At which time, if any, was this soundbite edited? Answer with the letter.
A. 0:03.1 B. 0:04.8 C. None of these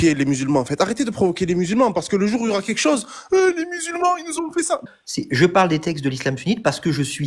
B